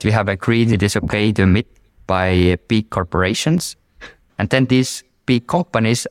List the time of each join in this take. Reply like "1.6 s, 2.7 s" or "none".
0.7 s, 4.2 s